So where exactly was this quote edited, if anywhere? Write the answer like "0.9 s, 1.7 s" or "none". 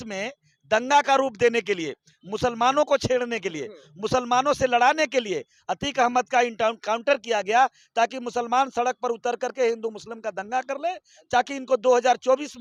none

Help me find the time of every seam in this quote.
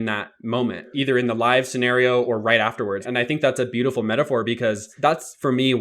0.9 s, 3.0 s, 4.9 s

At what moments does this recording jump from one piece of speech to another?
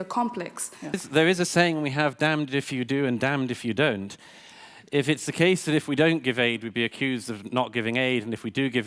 1.0 s

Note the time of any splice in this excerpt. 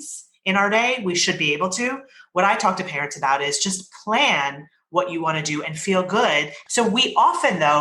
6.5 s

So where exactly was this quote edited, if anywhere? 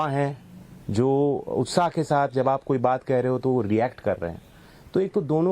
3.4 s

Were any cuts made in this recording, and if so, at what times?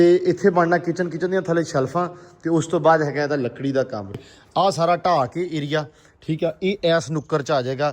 4.2 s

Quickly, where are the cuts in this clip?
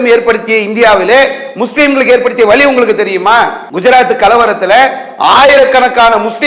3.6 s

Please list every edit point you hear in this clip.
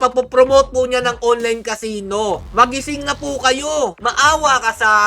4.0 s

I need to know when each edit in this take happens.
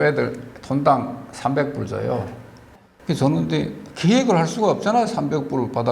2.6 s

